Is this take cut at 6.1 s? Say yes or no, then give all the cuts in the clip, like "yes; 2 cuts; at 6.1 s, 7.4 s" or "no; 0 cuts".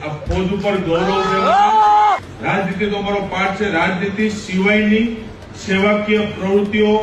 no; 1 cut; at 2.3 s